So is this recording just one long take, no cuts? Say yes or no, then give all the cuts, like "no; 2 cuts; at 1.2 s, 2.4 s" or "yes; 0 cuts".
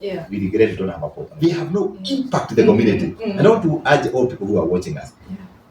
no; 1 cut; at 1.2 s